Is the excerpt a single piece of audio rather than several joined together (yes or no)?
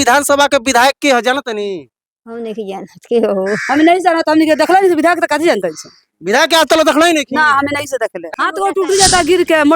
no